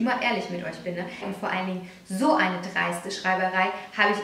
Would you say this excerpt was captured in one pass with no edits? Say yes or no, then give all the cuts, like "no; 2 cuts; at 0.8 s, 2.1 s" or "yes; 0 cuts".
no; 1 cut; at 1.2 s